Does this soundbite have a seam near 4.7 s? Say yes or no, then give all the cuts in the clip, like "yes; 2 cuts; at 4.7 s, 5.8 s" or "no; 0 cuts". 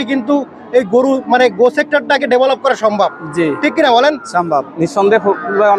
yes; 1 cut; at 4.7 s